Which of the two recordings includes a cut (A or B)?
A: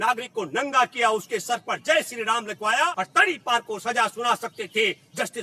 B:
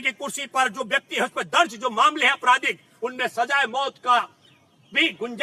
A